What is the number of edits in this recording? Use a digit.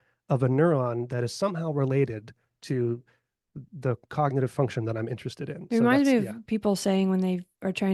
0